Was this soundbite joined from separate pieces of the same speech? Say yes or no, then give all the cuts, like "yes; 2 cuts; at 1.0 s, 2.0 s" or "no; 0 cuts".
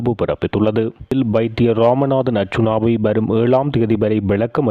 yes; 1 cut; at 1.1 s